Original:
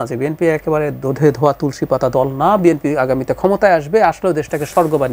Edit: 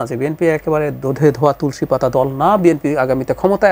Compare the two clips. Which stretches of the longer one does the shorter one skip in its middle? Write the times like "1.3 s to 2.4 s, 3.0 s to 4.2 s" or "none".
none